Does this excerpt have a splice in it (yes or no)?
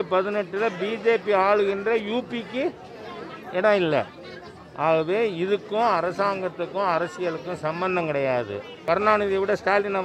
yes